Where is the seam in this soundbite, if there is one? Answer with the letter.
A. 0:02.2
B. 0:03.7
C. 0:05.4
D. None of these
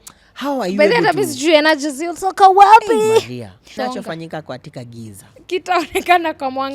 B